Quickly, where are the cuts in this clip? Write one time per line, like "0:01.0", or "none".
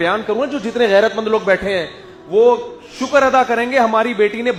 none